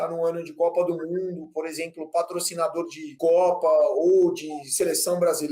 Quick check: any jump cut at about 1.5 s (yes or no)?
no